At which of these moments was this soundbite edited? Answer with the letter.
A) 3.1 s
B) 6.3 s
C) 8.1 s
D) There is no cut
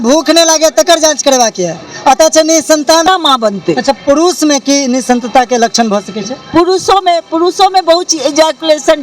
A